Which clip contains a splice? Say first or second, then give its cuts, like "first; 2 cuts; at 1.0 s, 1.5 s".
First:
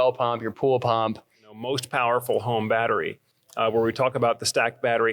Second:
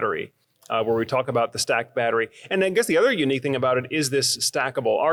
first; 1 cut; at 1.7 s